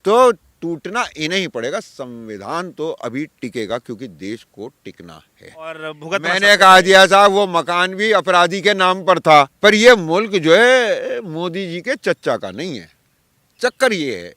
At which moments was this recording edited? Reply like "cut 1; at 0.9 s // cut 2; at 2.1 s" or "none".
cut 1; at 5.8 s // cut 2; at 9.5 s